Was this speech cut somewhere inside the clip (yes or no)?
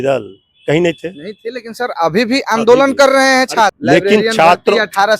yes